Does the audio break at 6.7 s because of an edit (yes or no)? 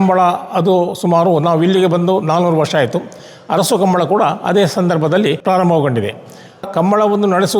yes